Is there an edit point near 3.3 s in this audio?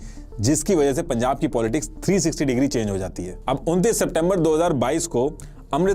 yes; 1 cut; at 3.3 s

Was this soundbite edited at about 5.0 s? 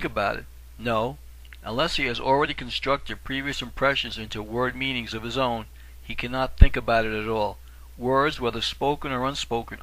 yes; 1 cut; at 5.0 s

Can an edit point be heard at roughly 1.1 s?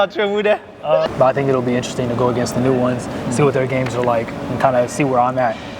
yes; 1 cut; at 1.1 s

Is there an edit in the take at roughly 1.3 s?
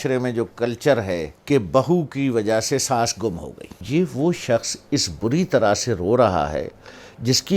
yes; 2 cuts; at 1.3 s, 3.8 s

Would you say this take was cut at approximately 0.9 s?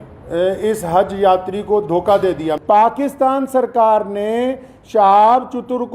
no; 1 cut; at 2.6 s

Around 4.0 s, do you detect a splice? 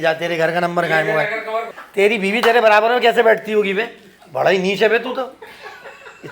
no; 1 cut; at 1.8 s

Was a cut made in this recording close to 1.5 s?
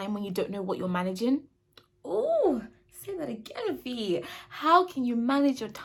no; 0 cuts

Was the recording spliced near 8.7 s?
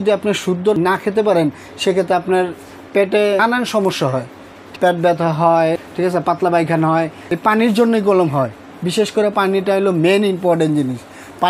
no; 5 cuts; at 0.8 s, 3.4 s, 4.6 s, 5.8 s, 7.2 s

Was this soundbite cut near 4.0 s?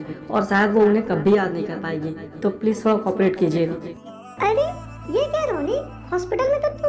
yes; 1 cut; at 4.0 s

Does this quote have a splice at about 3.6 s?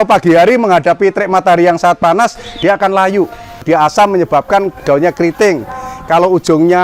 yes; 1 cut; at 3.6 s

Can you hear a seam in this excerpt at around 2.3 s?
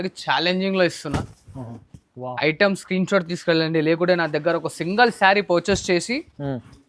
no; 0 cuts

